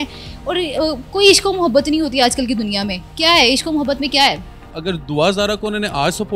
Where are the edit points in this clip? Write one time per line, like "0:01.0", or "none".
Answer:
0:04.7